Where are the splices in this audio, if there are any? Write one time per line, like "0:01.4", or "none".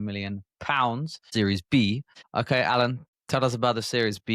0:01.2
0:02.2
0:03.1